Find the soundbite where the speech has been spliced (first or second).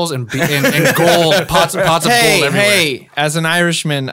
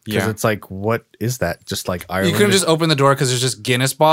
second